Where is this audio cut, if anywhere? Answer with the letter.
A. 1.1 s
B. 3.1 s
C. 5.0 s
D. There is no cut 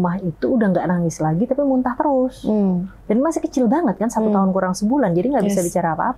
D